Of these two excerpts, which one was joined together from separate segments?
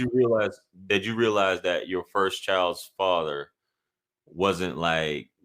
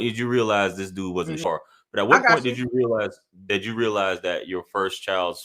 second; 1 cut; at 1.4 s

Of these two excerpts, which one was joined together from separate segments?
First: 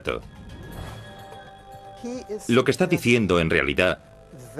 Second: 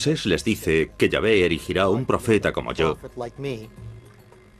second; 1 cut; at 1.2 s

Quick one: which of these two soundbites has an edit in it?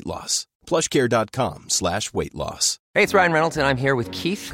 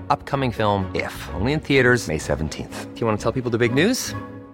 first; 1 cut; at 2.7 s

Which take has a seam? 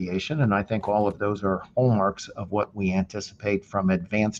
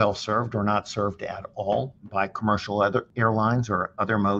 second; 2 cuts; at 2.0 s, 3.1 s

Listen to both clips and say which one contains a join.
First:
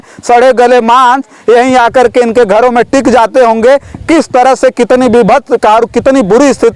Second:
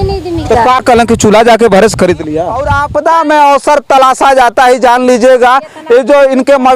second; 1 cut; at 2.7 s

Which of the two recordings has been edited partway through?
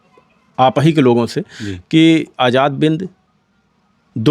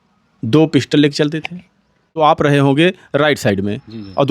second; 1 cut; at 2.0 s

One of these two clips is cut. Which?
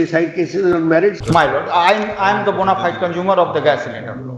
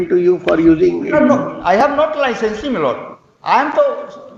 first; 1 cut; at 1.2 s

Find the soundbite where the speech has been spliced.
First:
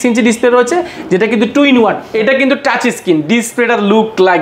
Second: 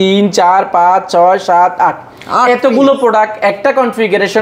first; 1 cut; at 2.1 s

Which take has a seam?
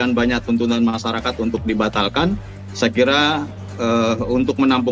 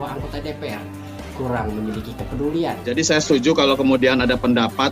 second; 1 cut; at 2.8 s

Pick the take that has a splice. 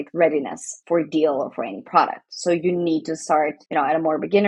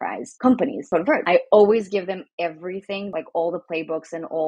second; 2 cuts; at 1.1 s, 3.1 s

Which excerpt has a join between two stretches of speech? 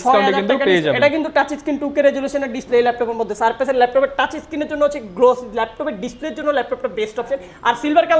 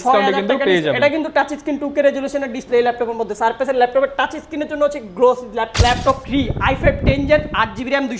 second; 1 cut; at 5.7 s

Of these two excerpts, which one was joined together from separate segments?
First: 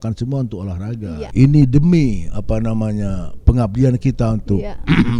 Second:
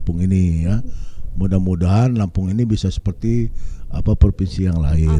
first; 1 cut; at 1.2 s

